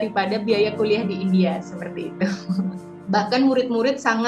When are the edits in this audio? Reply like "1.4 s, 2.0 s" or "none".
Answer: 2.8 s